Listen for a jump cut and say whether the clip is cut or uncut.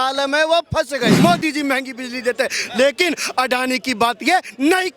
cut